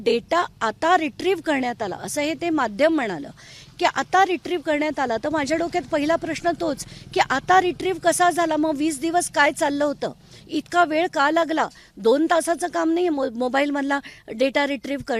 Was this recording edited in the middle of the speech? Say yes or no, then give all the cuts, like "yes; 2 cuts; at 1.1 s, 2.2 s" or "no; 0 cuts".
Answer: no; 0 cuts